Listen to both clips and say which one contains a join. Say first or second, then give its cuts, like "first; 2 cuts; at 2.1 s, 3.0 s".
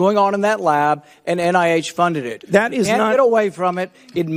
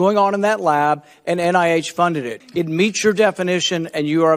second; 1 cut; at 2.3 s